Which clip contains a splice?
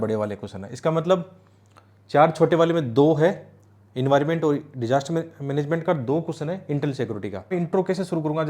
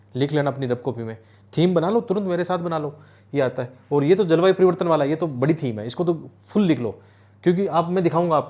first; 1 cut; at 7.5 s

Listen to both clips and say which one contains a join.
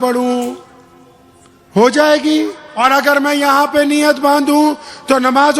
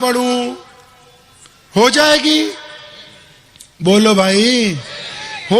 first; 1 cut; at 2.6 s

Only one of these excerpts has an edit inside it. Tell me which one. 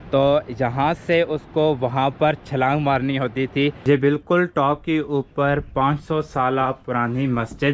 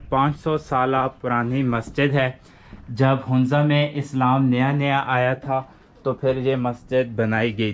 first; 1 cut; at 3.8 s

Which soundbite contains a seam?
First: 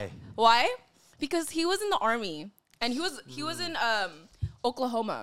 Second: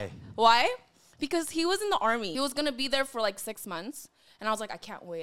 second; 1 cut; at 2.3 s

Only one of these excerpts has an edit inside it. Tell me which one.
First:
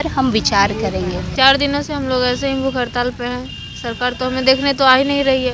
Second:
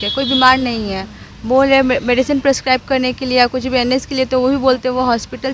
first; 1 cut; at 1.3 s

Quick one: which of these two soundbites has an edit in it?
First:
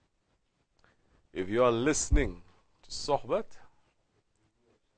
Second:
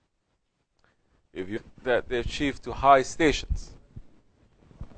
first; 1 cut; at 1.5 s

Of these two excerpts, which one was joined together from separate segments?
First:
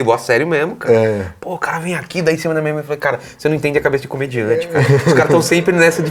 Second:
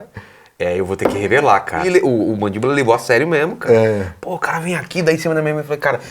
second; 1 cut; at 1.9 s

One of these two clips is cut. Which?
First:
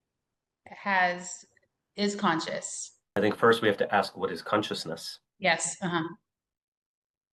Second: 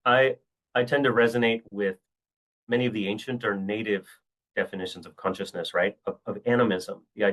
first; 1 cut; at 3.2 s

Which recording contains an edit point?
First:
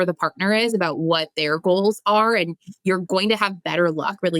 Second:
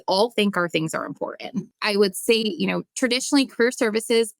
second; 2 cuts; at 1.7 s, 2.9 s

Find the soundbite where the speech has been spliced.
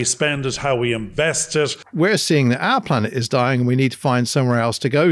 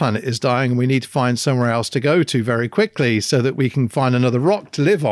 first; 1 cut; at 1.8 s

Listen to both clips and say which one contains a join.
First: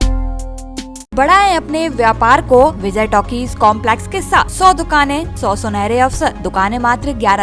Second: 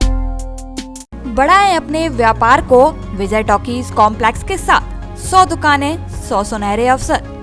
first; 5 cuts; at 1.1 s, 2.8 s, 4.5 s, 5.3 s, 6.4 s

